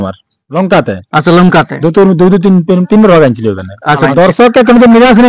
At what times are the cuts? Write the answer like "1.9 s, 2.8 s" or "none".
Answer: 4.1 s

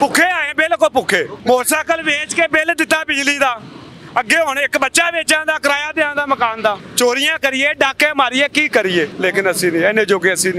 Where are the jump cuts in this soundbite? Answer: 1.3 s, 6.9 s, 9.1 s

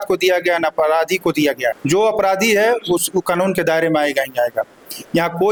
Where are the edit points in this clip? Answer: none

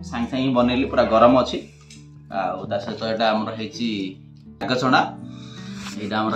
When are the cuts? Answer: 4.6 s

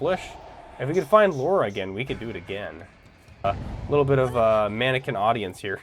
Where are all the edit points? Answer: 3.4 s

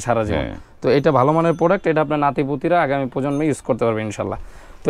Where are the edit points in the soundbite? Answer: none

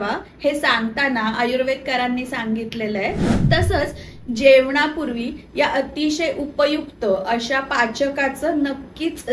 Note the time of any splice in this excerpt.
3.3 s

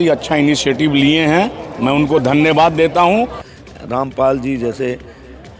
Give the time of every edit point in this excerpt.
3.4 s

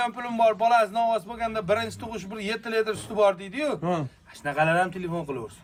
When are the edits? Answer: none

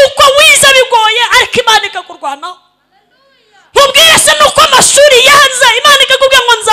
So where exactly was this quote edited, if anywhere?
none

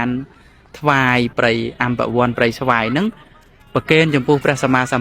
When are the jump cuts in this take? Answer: 1.3 s

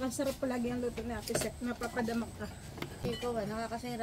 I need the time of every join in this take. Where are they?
3.1 s

